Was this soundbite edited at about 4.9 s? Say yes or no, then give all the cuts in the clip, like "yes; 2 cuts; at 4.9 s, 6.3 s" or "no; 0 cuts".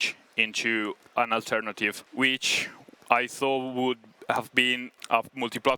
yes; 2 cuts; at 2.0 s, 4.9 s